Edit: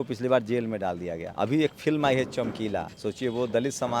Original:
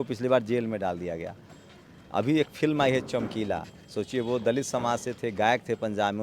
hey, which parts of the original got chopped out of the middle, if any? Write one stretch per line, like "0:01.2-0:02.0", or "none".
0:01.2-0:02.0
0:03.7-0:03.9